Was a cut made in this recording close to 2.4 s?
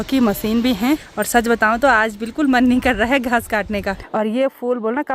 no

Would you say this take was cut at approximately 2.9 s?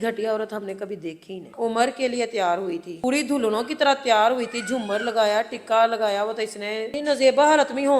yes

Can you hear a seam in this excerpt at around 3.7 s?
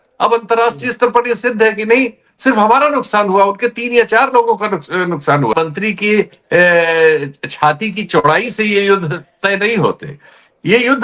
no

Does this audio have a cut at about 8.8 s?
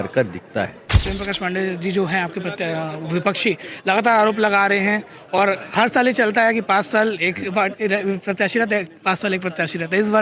no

